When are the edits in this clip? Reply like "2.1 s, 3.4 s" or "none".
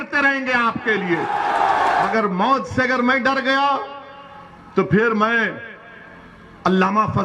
2.1 s